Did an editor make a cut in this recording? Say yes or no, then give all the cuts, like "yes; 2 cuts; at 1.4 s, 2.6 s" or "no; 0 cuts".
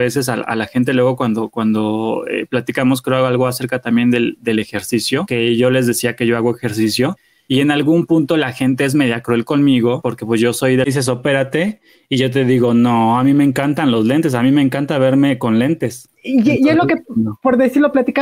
yes; 1 cut; at 10.9 s